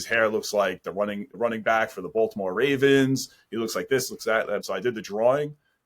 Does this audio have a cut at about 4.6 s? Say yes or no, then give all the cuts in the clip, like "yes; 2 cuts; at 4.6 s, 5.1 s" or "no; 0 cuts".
yes; 1 cut; at 4.6 s